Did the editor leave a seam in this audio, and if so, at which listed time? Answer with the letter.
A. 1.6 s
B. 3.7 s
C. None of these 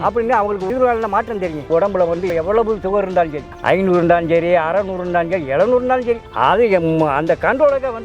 A